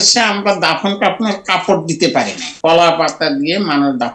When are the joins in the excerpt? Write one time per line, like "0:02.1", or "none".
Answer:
0:02.5